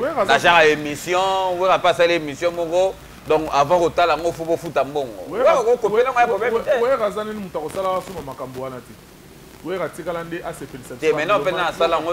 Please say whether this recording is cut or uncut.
uncut